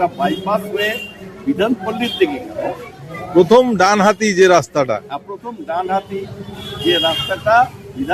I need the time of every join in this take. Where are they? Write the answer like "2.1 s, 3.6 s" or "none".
none